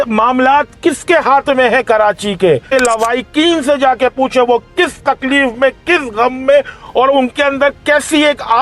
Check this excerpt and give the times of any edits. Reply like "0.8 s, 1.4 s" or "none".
2.6 s